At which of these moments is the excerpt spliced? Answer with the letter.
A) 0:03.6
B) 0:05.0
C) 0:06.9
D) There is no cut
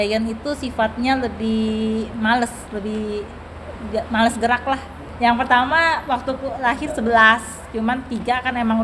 B